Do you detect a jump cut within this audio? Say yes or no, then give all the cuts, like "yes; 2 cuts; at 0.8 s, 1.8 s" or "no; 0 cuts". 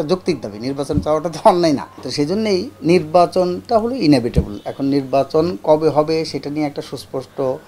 yes; 1 cut; at 2.0 s